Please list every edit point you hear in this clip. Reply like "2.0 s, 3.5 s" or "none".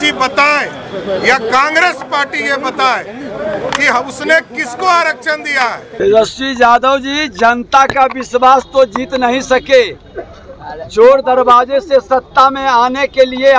6.0 s